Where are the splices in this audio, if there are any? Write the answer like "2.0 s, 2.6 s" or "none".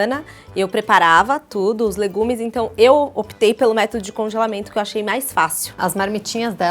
5.8 s